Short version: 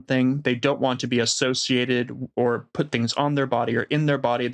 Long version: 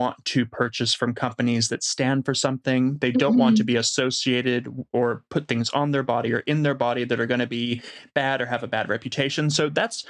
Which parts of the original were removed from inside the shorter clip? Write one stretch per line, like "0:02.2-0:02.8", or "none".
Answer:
none